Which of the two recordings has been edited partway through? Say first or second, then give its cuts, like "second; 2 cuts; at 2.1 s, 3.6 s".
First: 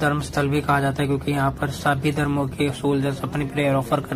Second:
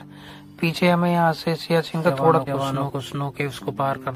second; 1 cut; at 2.4 s